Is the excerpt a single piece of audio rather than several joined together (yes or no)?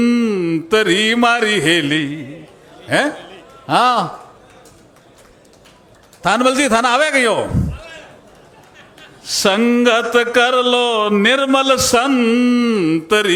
yes